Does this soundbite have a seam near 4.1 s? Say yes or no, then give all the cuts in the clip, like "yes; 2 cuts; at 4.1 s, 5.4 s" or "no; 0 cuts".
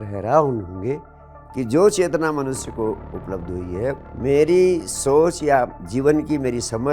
yes; 1 cut; at 4.1 s